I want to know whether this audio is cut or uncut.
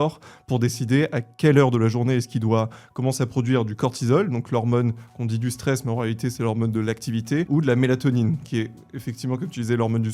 cut